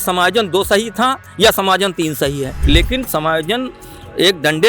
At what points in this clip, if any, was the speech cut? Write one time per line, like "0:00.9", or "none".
0:02.5